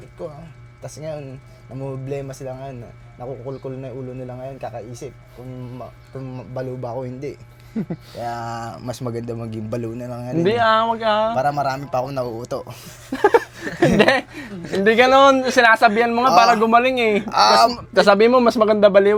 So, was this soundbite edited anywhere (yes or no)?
no